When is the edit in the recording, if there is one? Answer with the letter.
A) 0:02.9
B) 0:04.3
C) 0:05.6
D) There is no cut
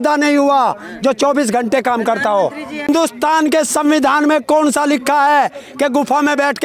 A